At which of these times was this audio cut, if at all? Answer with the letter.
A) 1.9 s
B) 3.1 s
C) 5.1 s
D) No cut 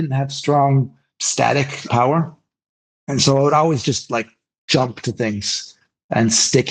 A